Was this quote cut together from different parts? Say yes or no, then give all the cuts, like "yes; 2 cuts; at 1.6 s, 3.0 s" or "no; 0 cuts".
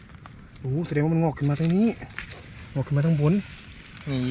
no; 0 cuts